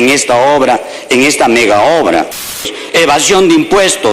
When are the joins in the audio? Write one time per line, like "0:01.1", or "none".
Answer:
0:02.6